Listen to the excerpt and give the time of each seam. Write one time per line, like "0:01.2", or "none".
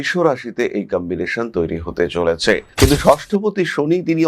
0:02.7